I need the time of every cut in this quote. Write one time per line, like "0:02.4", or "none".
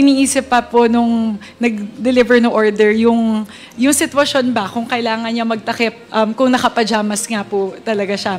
none